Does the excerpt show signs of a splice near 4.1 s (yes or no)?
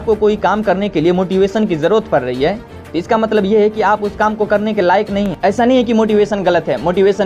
no